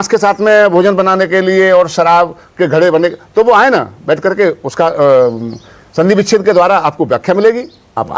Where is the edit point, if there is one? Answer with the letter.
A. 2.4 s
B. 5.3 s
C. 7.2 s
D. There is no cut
D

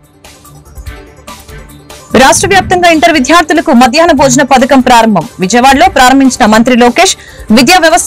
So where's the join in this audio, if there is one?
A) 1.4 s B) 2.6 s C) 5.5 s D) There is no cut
A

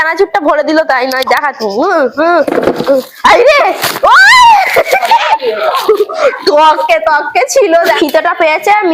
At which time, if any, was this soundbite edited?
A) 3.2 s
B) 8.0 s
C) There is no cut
B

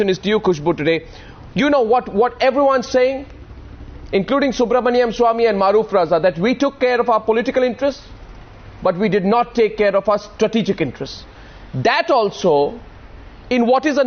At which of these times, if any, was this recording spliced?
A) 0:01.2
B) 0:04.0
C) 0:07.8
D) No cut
D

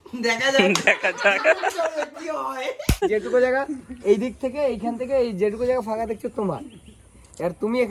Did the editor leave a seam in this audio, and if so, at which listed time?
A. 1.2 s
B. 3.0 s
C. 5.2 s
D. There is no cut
B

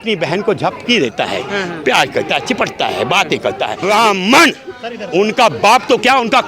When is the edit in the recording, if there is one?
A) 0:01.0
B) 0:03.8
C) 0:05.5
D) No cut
B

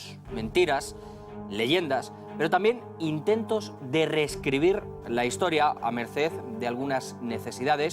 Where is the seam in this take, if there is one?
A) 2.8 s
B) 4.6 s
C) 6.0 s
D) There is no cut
B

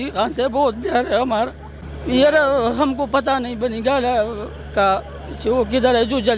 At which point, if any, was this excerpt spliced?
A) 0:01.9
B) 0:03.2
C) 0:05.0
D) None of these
A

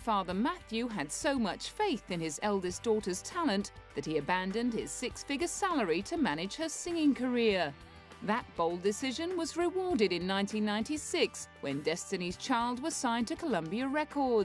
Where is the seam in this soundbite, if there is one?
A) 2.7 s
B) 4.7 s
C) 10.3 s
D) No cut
D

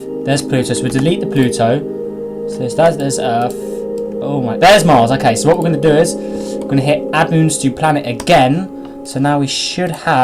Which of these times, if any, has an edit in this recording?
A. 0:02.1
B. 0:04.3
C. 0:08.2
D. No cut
D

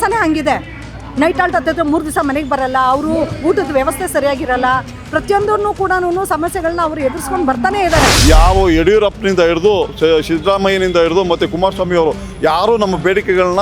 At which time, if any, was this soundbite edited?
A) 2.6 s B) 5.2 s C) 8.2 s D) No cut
C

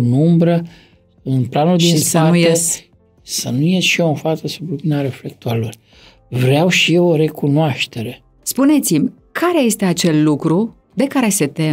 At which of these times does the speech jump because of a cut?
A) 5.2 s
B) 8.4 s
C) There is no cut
B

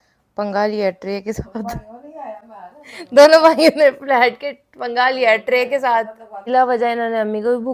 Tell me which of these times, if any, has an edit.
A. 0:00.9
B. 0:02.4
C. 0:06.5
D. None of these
D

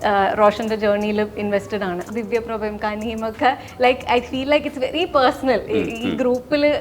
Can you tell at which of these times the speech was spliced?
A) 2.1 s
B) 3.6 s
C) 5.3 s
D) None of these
A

